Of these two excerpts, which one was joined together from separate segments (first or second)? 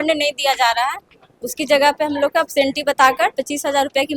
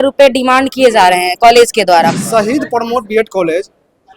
second